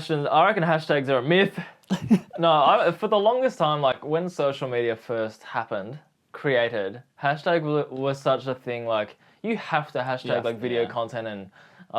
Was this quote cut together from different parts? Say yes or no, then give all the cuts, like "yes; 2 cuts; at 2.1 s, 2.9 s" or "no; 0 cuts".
no; 0 cuts